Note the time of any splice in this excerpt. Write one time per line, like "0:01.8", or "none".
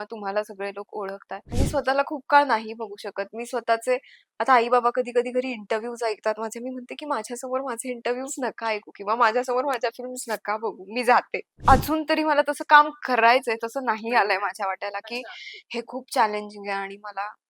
0:01.5
0:11.4

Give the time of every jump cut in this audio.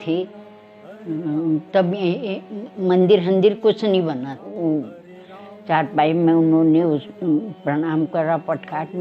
0:04.4

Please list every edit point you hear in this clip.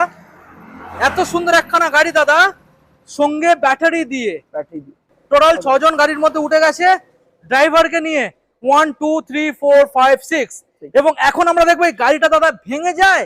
0:05.1

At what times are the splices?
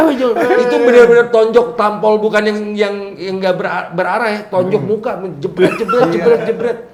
none

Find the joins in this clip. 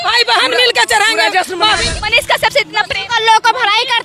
0:02.0

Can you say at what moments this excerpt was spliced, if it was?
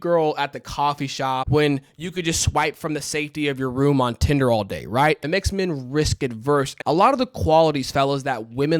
0:01.5
0:05.2
0:06.7

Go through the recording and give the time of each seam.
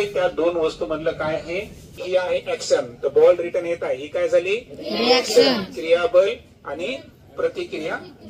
0:01.9

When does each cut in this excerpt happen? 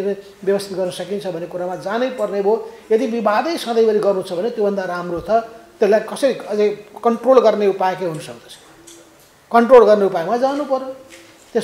none

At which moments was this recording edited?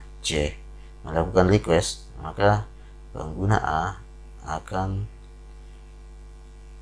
none

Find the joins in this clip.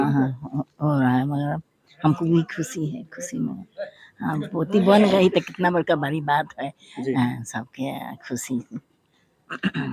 none

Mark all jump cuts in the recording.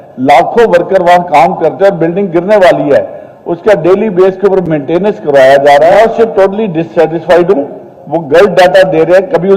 0:06.0

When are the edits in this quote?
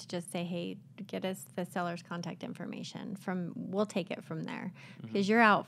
none

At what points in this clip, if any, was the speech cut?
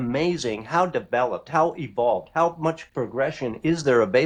none

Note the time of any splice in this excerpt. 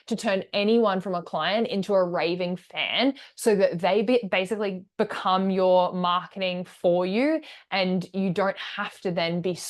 none

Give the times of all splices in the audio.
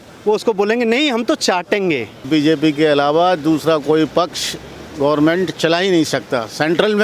0:02.2

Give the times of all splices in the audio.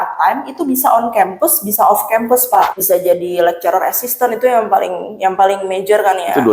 0:02.7

